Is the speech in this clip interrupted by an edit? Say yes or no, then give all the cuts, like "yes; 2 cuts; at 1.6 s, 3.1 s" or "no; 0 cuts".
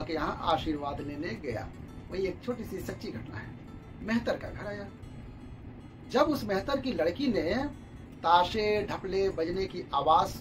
yes; 1 cut; at 3.9 s